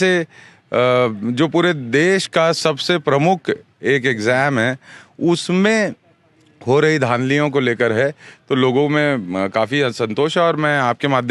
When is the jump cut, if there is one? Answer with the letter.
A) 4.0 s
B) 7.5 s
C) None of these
C